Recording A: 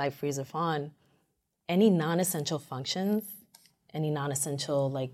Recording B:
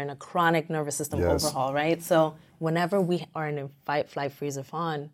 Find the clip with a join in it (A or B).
B